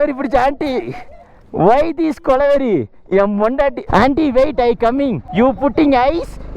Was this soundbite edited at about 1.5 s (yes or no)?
no